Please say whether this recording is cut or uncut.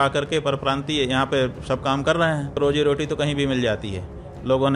cut